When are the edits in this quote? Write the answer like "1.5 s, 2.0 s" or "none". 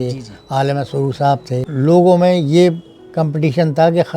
1.7 s